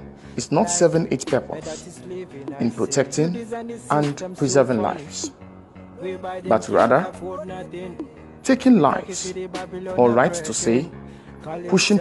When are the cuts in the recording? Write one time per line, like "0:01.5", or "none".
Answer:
0:07.1
0:08.4